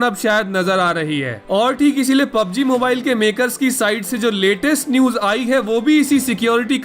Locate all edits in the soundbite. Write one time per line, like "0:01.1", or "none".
0:01.4